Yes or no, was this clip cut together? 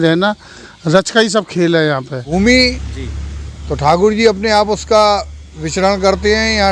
yes